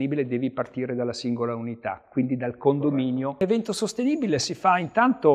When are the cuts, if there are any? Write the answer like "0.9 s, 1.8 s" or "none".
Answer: 3.4 s